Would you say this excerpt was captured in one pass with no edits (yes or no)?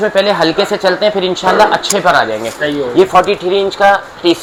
yes